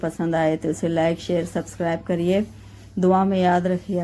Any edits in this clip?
no; 0 cuts

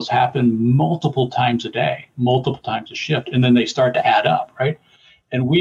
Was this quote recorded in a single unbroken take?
yes; 0 cuts

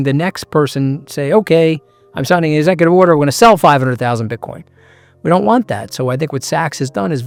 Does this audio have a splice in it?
no; 0 cuts

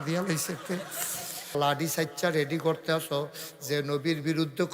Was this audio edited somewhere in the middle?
yes; 1 cut; at 1.6 s

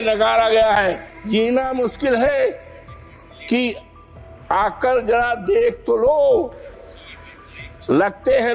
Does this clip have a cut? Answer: yes; 1 cut; at 1.1 s

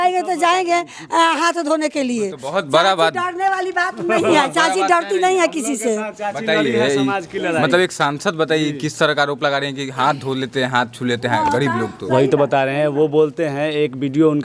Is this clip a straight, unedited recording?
yes; 0 cuts

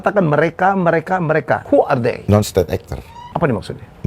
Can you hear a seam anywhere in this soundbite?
yes; 2 cuts; at 1.8 s, 3.1 s

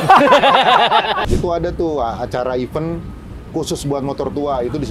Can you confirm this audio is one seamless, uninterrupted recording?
no; 1 cut; at 1.2 s

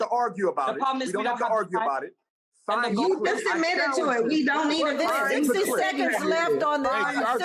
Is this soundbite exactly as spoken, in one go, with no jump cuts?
yes; 0 cuts

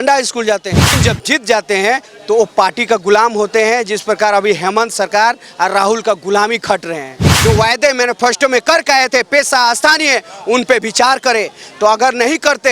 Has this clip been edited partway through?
yes; 2 cuts; at 1.0 s, 7.3 s

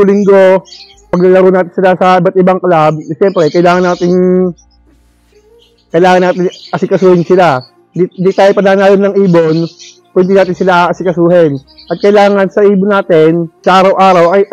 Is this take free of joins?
no; 1 cut; at 1.1 s

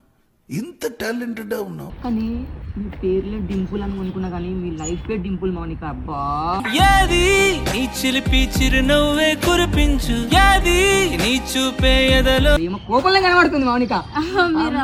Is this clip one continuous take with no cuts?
no; 2 cuts; at 1.9 s, 12.6 s

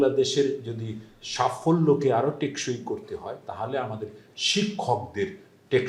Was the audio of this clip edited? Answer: no; 0 cuts

